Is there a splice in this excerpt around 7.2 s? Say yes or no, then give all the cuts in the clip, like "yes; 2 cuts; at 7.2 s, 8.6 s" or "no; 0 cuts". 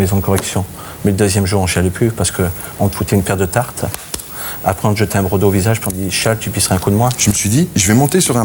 yes; 1 cut; at 7.2 s